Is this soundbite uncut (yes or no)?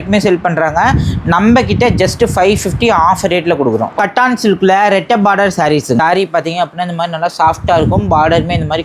no